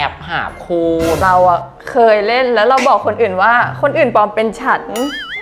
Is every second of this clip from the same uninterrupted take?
no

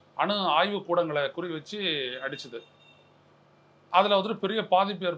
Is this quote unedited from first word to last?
yes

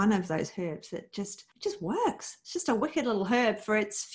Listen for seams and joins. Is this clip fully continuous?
no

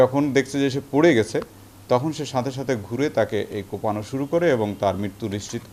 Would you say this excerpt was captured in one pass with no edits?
yes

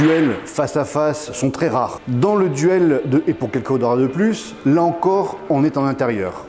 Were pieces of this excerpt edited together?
yes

